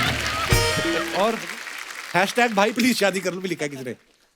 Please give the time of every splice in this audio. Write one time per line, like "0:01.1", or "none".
0:01.1